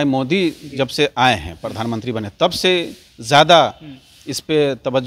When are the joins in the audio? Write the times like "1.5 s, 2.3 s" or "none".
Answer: none